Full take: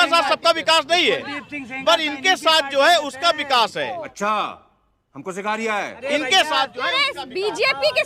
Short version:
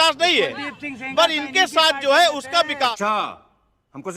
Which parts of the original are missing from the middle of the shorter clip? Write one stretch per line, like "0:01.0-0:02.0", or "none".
0:03.6-0:04.1